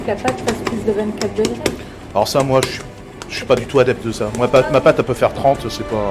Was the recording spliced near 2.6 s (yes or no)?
no